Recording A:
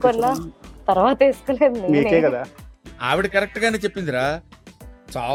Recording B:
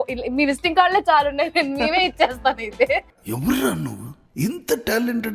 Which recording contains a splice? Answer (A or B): B